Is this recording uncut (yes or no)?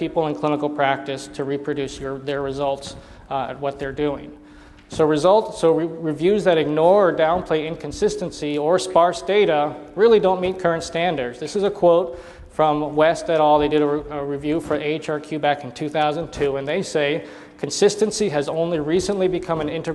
no